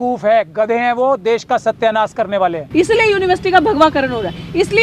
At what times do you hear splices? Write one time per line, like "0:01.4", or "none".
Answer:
0:02.6